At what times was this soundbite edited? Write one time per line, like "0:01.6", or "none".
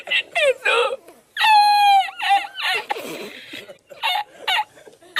none